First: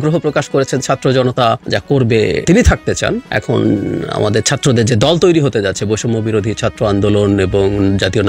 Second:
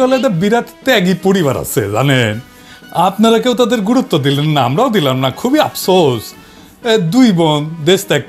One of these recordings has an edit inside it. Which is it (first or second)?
first